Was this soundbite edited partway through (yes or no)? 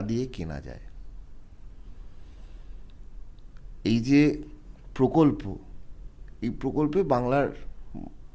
no